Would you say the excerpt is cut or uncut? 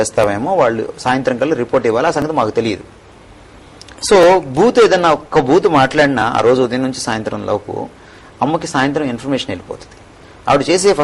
uncut